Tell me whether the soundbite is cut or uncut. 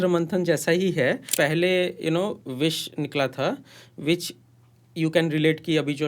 cut